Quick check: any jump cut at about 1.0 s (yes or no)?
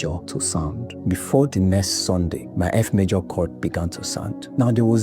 yes